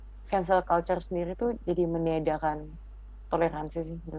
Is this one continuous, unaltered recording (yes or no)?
yes